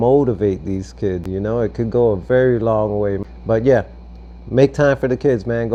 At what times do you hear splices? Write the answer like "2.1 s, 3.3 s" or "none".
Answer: none